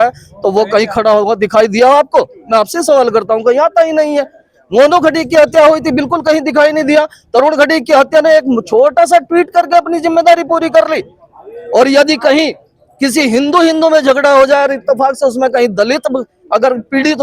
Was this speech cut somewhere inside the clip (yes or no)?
no